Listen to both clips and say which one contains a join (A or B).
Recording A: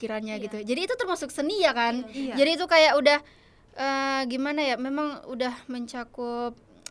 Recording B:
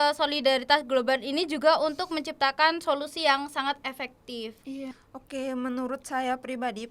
B